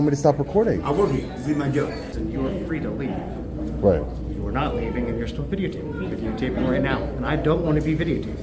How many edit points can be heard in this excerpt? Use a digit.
1